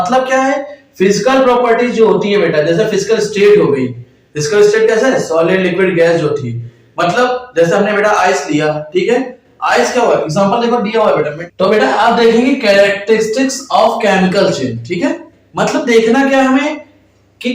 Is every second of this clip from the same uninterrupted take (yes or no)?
no